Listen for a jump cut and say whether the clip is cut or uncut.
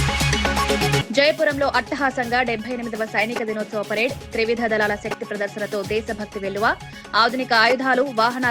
uncut